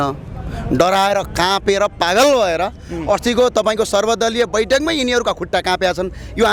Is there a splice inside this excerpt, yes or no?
no